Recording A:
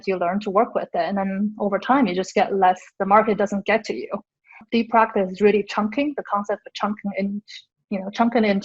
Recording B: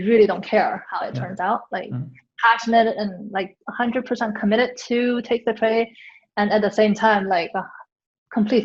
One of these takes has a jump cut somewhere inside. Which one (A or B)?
A